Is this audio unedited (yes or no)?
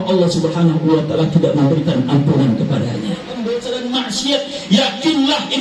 no